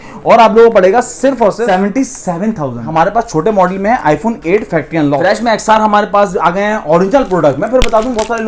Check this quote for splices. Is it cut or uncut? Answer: cut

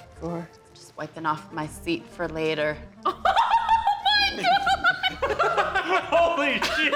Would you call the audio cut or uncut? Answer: uncut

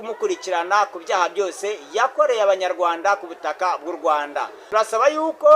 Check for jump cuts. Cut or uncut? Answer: cut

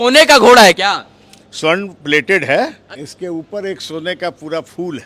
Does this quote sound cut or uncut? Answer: cut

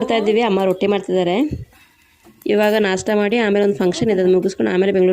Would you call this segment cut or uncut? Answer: uncut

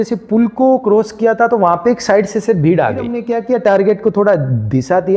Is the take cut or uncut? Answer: cut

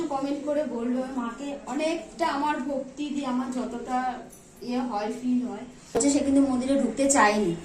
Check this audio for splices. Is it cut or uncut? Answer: cut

